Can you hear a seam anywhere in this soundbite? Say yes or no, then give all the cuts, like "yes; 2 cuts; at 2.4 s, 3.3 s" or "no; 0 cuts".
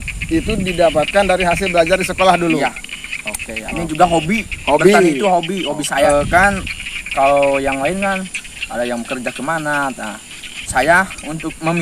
yes; 2 cuts; at 3.7 s, 6.1 s